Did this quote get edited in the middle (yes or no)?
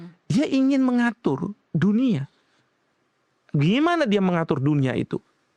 no